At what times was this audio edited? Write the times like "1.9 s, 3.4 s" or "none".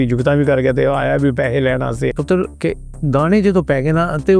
2.1 s